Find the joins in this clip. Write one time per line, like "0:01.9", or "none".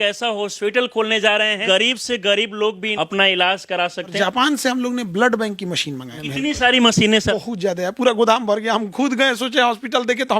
0:01.6
0:02.9
0:04.1
0:06.1
0:07.3